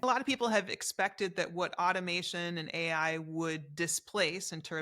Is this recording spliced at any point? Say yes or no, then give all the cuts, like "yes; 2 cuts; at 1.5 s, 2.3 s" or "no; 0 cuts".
no; 0 cuts